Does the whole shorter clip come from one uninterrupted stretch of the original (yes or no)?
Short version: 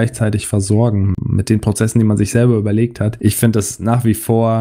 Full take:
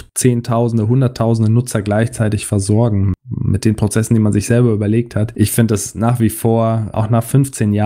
no